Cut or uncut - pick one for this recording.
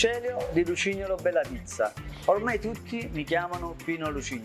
uncut